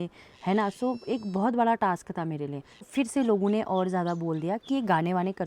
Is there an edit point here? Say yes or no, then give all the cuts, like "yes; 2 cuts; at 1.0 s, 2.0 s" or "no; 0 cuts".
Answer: yes; 1 cut; at 2.9 s